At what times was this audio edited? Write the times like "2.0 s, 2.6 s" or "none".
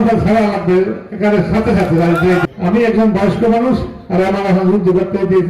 2.4 s